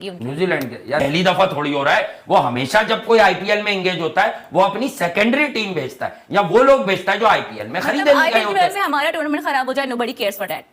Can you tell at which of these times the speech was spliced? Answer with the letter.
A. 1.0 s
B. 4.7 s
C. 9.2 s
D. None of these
A